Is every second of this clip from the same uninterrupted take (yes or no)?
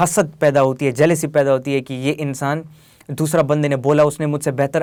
yes